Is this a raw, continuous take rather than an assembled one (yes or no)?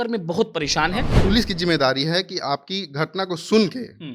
no